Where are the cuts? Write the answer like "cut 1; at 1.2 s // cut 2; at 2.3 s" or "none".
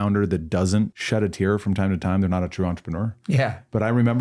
cut 1; at 1.0 s